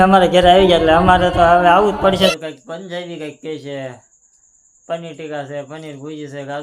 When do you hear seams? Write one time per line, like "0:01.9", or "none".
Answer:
0:02.4